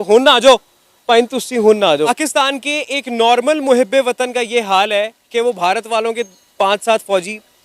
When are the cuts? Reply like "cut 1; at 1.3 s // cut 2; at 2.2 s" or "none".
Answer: cut 1; at 2.1 s